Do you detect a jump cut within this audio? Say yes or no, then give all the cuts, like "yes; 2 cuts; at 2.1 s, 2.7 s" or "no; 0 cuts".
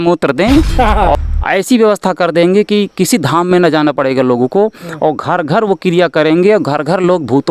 yes; 1 cut; at 1.1 s